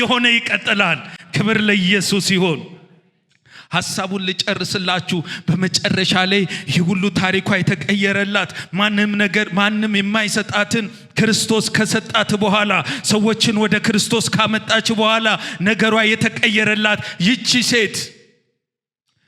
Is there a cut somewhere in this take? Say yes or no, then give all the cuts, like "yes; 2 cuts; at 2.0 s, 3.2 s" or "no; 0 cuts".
no; 0 cuts